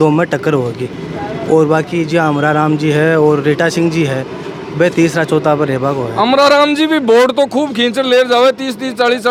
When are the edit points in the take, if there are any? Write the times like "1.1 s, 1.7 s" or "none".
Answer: none